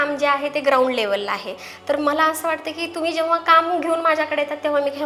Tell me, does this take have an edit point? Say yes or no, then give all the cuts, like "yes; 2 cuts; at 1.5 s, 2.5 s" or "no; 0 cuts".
no; 0 cuts